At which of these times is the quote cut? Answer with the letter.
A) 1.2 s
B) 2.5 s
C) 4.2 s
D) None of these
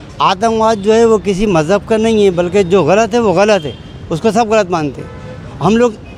D